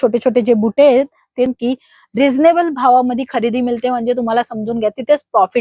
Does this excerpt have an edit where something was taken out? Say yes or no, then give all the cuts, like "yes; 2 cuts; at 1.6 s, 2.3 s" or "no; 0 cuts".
yes; 1 cut; at 1.5 s